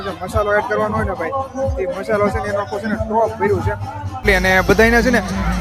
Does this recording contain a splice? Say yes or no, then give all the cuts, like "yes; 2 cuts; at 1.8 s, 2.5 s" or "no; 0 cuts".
yes; 1 cut; at 4.2 s